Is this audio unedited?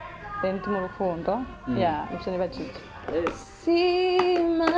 no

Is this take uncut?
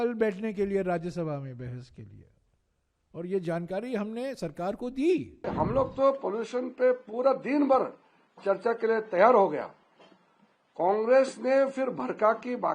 no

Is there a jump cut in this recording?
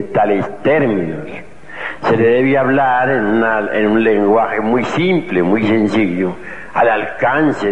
yes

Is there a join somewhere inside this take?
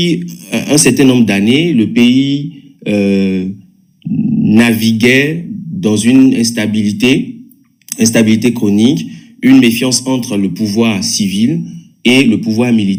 no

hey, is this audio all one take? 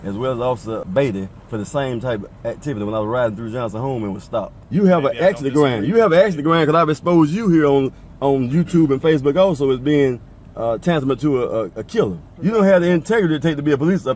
no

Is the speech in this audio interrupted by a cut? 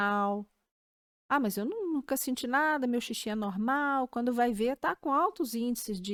no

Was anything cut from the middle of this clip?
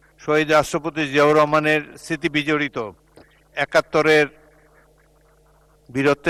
no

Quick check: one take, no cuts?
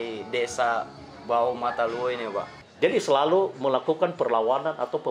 no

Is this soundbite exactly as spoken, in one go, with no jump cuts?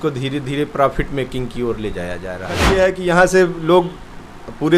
no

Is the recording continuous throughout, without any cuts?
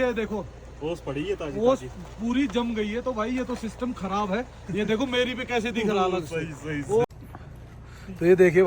no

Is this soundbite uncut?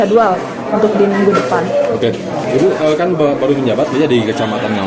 yes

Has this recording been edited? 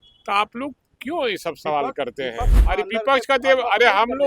yes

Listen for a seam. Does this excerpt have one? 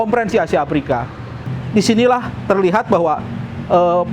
yes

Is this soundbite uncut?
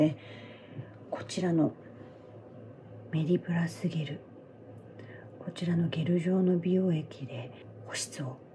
no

